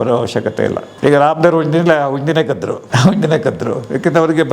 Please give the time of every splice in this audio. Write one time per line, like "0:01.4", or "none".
0:00.9
0:02.8